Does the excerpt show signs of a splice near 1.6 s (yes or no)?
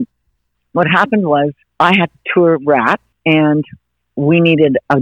yes